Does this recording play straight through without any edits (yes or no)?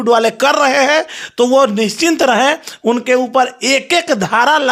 yes